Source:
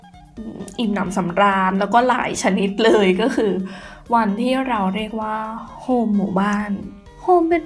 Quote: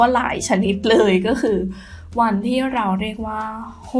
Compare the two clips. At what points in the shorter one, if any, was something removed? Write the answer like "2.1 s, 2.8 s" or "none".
none